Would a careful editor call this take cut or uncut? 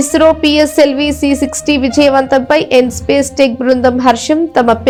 uncut